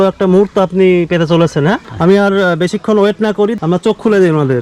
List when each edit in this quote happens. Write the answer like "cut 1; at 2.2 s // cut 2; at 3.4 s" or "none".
cut 1; at 1.9 s // cut 2; at 3.5 s